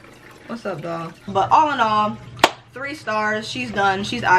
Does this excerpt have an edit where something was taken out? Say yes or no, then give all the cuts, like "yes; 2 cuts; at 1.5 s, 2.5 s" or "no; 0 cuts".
yes; 1 cut; at 1.3 s